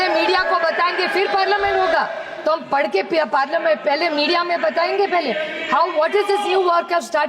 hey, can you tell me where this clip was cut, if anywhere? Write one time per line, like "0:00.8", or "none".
none